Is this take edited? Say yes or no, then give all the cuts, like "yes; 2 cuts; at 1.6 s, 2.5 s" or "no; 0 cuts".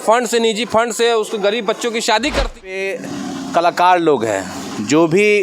yes; 1 cut; at 2.7 s